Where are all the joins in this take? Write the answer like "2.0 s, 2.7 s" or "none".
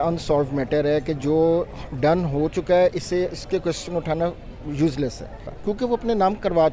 5.5 s